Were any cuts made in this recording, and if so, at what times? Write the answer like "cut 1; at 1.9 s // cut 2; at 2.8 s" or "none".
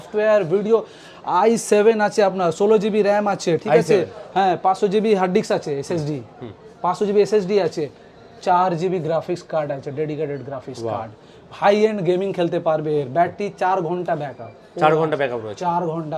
none